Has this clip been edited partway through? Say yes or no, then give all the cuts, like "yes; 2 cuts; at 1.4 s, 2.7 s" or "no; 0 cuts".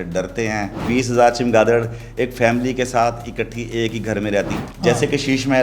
yes; 2 cuts; at 0.8 s, 4.5 s